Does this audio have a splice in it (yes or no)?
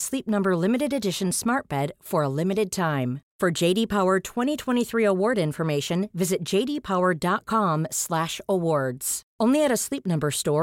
no